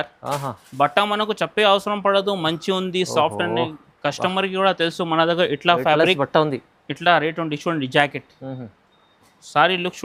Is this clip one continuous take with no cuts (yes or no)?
yes